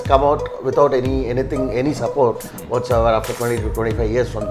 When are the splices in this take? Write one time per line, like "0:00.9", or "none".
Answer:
none